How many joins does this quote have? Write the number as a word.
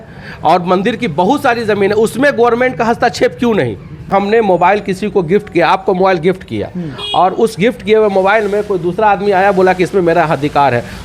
one